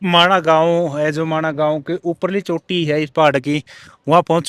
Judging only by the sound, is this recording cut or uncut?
uncut